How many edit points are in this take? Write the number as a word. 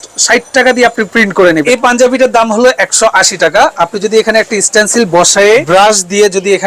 two